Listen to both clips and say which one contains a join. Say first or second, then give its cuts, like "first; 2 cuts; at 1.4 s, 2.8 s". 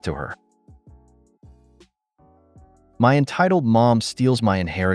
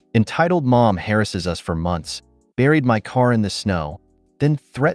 first; 2 cuts; at 0.9 s, 2.9 s